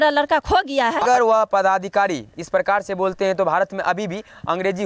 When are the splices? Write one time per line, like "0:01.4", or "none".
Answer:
0:01.0